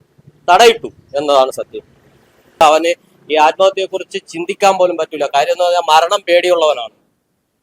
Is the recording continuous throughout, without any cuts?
no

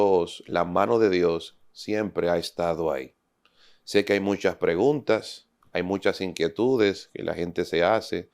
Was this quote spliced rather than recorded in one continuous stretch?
no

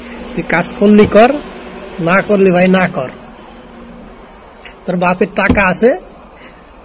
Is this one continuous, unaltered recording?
yes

